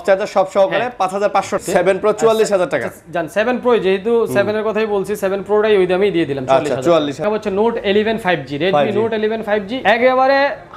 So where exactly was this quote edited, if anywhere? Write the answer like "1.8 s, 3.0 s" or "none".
1.6 s, 7.2 s, 9.7 s